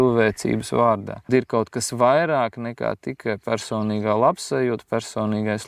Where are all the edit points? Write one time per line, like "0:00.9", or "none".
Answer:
0:01.3